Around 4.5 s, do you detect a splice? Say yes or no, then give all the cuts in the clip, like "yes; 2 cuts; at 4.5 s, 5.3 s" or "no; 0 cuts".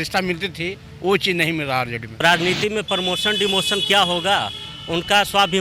no; 1 cut; at 2.2 s